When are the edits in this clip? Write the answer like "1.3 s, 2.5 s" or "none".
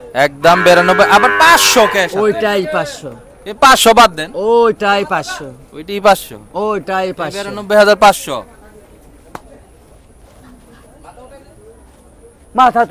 none